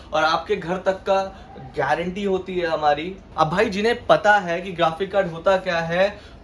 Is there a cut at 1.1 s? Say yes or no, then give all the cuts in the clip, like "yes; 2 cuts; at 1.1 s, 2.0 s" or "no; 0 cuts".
no; 1 cut; at 3.2 s